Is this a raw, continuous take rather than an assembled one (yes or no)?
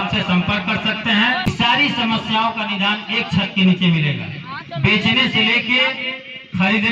no